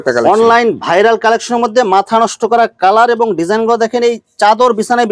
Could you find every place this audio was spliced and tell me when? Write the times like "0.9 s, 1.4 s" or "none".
none